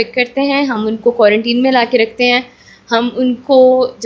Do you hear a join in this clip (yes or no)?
no